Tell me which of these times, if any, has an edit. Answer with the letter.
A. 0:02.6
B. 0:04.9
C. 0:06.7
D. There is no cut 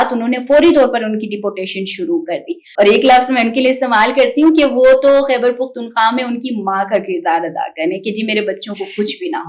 A